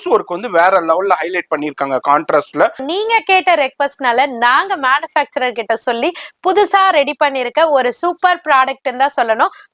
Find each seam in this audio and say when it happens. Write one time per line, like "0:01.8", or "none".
0:02.9